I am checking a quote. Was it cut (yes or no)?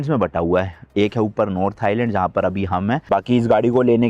yes